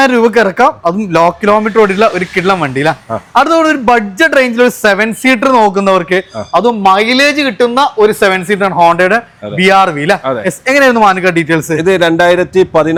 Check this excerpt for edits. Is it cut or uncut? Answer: uncut